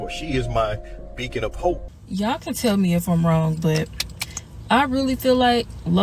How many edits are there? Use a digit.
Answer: 1